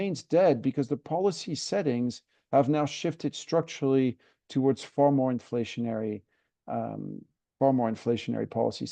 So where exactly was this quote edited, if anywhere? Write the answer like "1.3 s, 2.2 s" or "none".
none